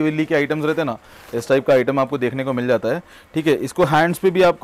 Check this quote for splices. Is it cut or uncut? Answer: uncut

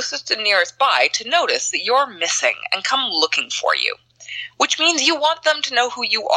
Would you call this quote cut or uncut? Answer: uncut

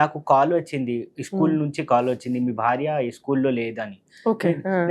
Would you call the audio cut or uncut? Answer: uncut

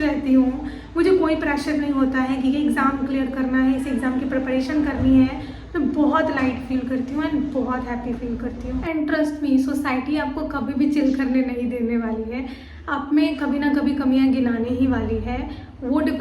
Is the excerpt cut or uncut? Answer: cut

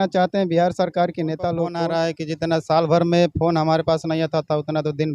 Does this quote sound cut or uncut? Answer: cut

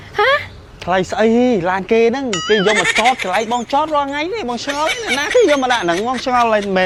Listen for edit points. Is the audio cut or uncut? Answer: uncut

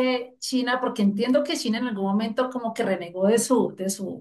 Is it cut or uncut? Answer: uncut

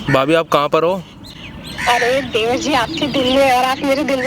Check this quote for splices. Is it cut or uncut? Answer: uncut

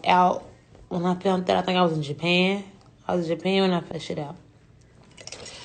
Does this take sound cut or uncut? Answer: cut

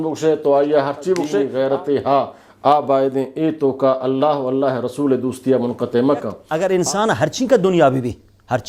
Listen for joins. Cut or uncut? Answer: cut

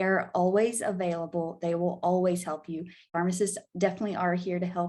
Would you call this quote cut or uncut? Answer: cut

